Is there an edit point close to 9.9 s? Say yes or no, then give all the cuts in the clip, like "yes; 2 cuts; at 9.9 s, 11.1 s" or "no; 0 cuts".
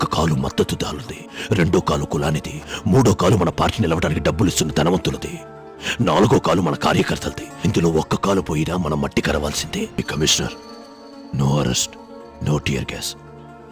yes; 1 cut; at 9.9 s